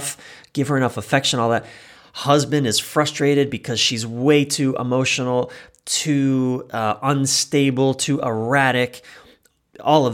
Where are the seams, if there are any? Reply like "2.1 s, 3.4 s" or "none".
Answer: none